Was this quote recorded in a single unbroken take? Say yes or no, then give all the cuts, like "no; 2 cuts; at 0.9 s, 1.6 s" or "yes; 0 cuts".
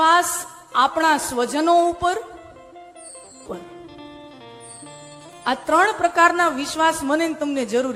yes; 0 cuts